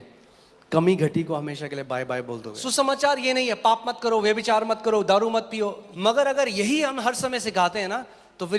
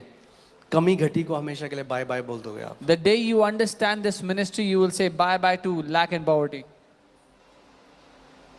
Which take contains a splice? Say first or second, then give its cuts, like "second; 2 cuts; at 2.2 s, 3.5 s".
first; 2 cuts; at 2.5 s, 5.8 s